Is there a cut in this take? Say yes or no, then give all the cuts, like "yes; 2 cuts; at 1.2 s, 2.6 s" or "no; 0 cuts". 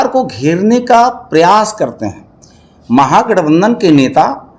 no; 0 cuts